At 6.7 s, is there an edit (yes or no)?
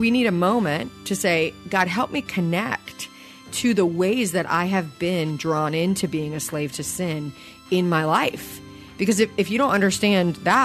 no